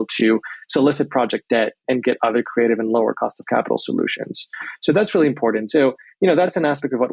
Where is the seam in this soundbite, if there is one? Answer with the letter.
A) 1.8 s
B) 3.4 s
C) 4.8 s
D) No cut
A